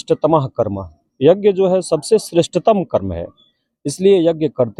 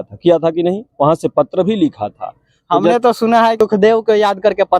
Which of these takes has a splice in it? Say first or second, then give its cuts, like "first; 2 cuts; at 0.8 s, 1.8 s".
second; 1 cut; at 3.6 s